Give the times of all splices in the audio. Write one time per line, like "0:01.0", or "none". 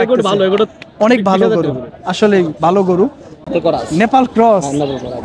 0:03.5